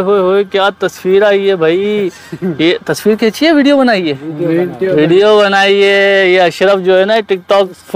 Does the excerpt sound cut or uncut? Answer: uncut